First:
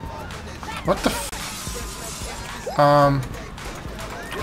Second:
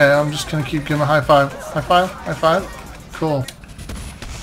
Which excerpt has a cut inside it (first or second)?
second